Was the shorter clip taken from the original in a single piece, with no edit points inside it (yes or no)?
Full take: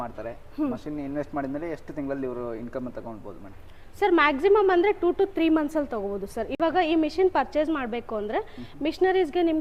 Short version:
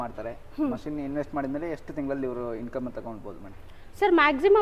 yes